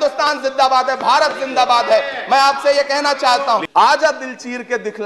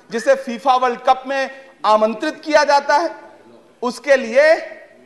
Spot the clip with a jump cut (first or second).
first